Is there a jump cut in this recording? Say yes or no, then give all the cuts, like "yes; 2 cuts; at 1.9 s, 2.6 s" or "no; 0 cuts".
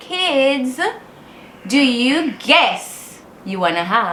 no; 0 cuts